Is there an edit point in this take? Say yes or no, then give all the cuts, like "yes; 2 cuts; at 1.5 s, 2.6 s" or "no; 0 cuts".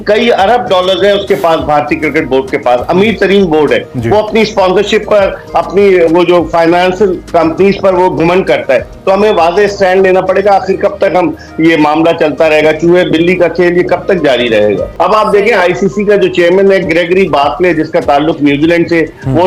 no; 0 cuts